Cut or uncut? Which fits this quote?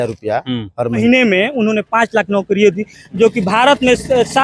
cut